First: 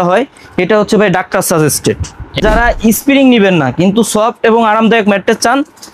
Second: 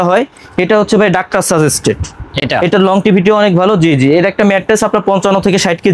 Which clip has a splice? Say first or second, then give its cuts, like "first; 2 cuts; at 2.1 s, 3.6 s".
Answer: first; 1 cut; at 2.4 s